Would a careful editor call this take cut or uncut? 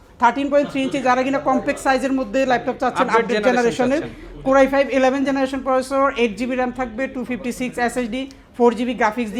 uncut